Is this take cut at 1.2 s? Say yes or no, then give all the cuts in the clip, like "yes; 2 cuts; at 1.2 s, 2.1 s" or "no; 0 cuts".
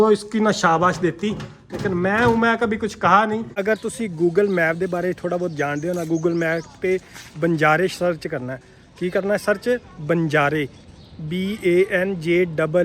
no; 1 cut; at 3.5 s